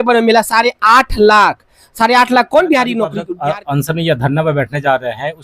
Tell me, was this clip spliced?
yes; 1 cut; at 3.2 s

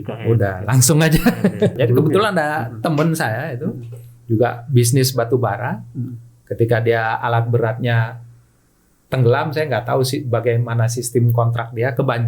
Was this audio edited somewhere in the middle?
yes; 1 cut; at 1.7 s

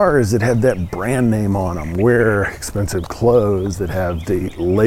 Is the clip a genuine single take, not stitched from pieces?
yes; 0 cuts

